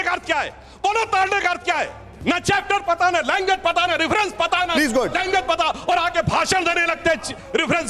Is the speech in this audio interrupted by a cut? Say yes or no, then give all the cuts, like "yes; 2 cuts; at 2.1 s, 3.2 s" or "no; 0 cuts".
yes; 1 cut; at 2.1 s